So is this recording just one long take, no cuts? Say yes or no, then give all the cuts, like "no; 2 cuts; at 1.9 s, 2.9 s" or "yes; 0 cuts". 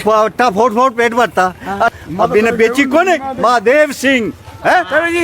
yes; 0 cuts